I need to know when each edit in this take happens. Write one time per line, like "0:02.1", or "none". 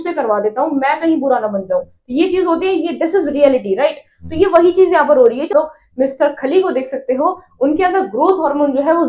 0:05.5